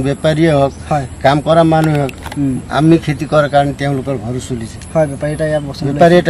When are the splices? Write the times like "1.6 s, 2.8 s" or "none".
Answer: none